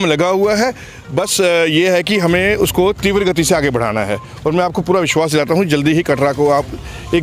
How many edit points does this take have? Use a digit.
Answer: 0